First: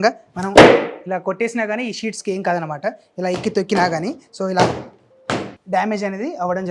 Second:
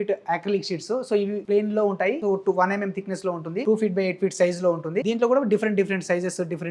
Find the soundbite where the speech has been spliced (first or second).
second